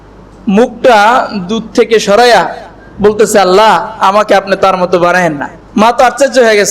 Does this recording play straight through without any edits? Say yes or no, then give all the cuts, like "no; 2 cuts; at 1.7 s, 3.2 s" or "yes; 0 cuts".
no; 1 cut; at 5.5 s